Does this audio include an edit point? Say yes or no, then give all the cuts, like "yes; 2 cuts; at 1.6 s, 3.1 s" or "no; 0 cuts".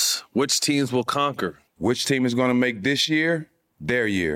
no; 0 cuts